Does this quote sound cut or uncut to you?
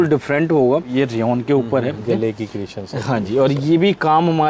cut